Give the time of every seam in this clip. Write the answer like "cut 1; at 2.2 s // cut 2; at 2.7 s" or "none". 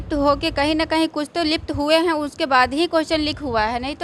none